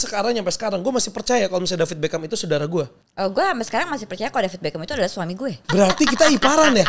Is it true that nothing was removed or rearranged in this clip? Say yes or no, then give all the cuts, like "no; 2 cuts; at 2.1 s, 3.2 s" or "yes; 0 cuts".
no; 2 cuts; at 3.0 s, 5.6 s